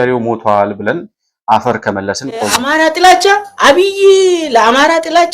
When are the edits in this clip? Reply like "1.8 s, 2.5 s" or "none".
2.6 s